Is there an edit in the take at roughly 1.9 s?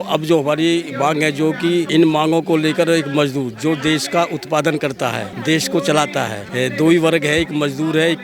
yes; 3 cuts; at 1.9 s, 5.3 s, 6.4 s

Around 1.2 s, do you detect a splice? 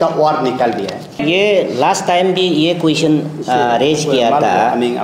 yes; 1 cut; at 1.2 s

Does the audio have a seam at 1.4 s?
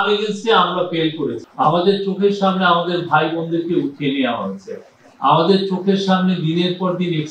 yes; 1 cut; at 1.4 s

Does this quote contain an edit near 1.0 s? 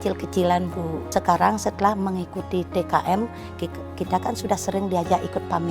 yes; 1 cut; at 1.0 s

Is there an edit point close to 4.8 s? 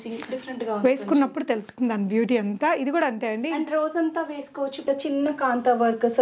yes; 1 cut; at 4.8 s

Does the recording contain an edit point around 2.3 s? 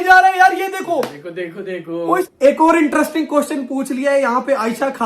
yes; 1 cut; at 2.3 s

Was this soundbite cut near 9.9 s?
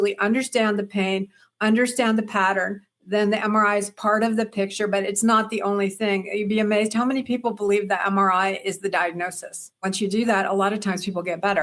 yes; 1 cut; at 9.9 s

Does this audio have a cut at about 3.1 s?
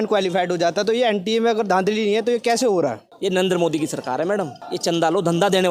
yes; 2 cuts; at 3.1 s, 4.6 s

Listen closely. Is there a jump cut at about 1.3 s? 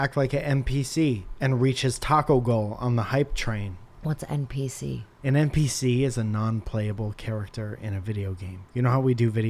yes; 3 cuts; at 1.3 s, 3.8 s, 5.1 s

